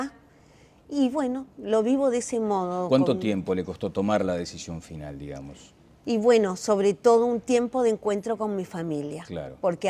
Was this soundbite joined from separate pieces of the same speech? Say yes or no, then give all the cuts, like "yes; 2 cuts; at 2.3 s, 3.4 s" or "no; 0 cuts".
yes; 1 cut; at 1.7 s